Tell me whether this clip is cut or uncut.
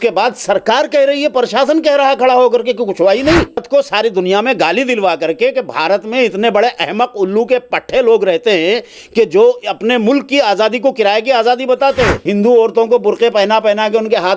cut